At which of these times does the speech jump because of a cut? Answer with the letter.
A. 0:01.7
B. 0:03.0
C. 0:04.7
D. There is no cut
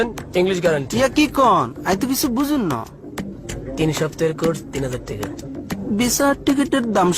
B